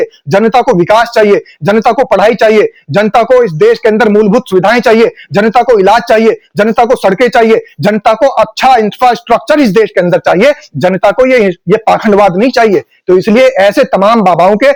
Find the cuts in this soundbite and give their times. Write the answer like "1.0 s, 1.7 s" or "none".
none

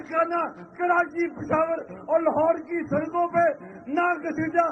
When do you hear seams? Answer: none

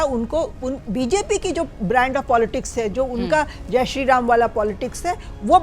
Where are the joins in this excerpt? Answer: none

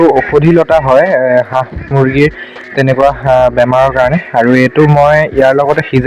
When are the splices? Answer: none

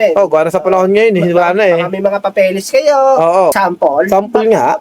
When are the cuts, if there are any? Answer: 3.5 s

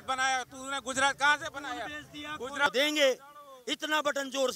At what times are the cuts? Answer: 2.7 s

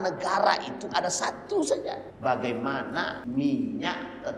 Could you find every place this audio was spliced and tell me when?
2.1 s, 3.2 s

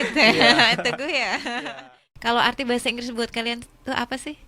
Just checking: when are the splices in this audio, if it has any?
1.6 s

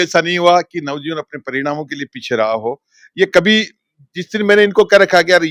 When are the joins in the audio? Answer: none

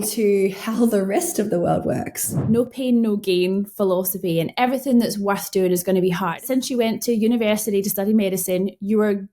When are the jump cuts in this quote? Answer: 2.3 s, 6.4 s

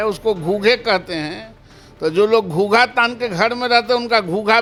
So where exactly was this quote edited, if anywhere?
none

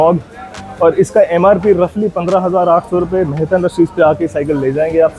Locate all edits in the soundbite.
none

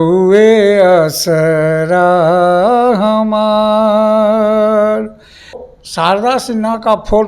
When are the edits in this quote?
5.7 s

